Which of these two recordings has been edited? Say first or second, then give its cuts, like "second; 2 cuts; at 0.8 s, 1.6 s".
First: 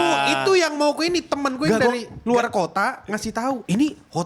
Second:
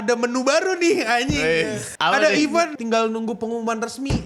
second; 2 cuts; at 1.9 s, 2.8 s